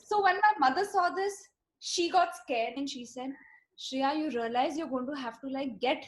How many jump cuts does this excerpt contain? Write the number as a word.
one